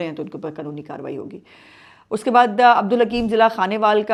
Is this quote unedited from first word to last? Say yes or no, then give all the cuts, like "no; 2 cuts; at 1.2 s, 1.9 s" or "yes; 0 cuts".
yes; 0 cuts